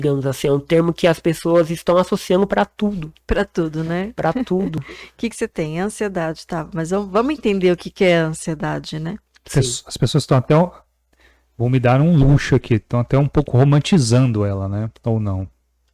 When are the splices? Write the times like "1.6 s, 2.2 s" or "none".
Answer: none